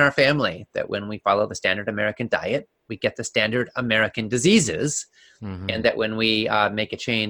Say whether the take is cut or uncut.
uncut